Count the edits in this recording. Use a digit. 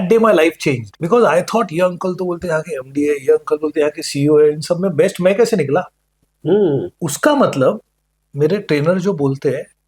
1